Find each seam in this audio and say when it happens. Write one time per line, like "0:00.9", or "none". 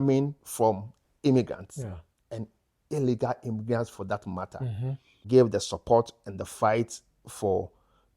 0:05.2